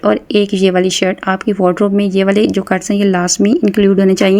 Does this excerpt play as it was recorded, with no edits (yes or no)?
yes